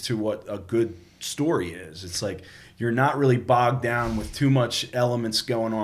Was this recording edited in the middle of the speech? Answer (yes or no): no